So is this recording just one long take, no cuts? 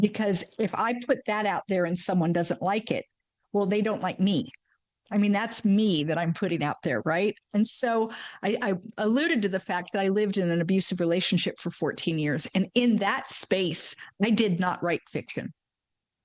yes; 0 cuts

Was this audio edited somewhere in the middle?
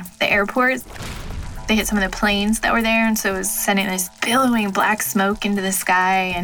no; 0 cuts

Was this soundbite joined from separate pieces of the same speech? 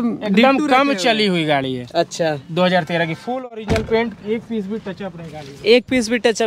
no; 0 cuts

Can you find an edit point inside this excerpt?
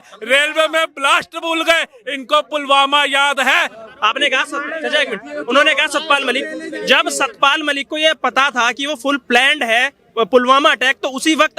yes; 1 cut; at 3.8 s

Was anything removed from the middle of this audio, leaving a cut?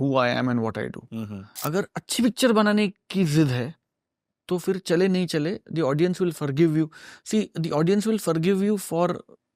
yes; 1 cut; at 1.4 s

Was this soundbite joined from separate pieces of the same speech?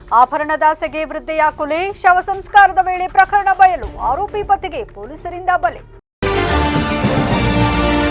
yes; 1 cut; at 5.9 s

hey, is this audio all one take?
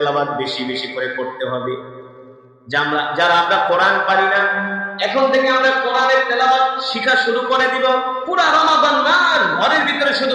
no; 1 cut; at 8.2 s

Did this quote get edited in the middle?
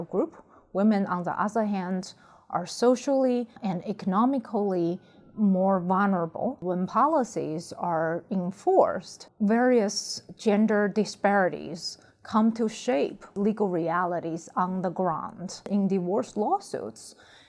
yes; 4 cuts; at 3.6 s, 6.6 s, 13.2 s, 15.6 s

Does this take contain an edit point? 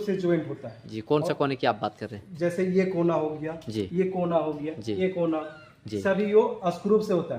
no; 0 cuts

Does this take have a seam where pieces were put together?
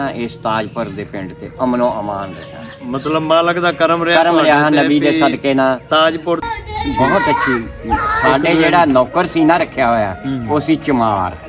yes; 1 cut; at 6.4 s

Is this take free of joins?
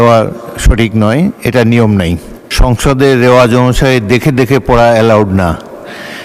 no; 1 cut; at 2.3 s

